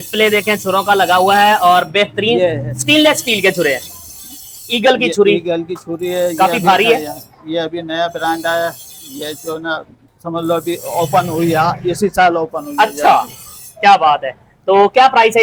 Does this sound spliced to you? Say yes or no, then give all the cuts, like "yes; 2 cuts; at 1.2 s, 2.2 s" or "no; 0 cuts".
no; 0 cuts